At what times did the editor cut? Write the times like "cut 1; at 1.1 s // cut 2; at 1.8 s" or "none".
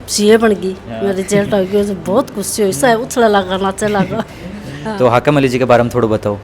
cut 1; at 4.7 s